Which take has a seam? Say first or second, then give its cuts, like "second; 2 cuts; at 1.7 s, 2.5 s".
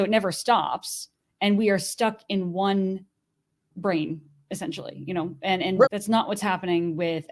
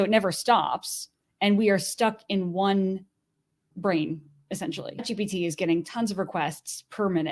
second; 1 cut; at 5.1 s